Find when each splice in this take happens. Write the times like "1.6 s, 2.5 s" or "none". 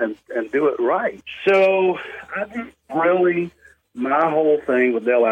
1.3 s